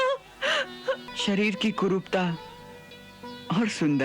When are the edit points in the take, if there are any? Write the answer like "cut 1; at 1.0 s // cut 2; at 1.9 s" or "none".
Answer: cut 1; at 1.1 s